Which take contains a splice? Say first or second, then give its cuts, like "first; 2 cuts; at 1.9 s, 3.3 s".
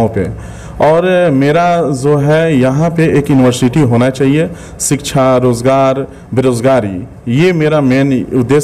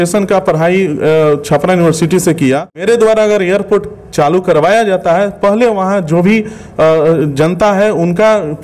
second; 1 cut; at 2.8 s